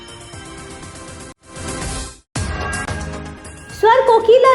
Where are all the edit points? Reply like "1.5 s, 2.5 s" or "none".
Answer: 1.4 s, 3.5 s